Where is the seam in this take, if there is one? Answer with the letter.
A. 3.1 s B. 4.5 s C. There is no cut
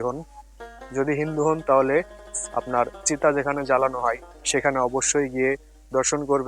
C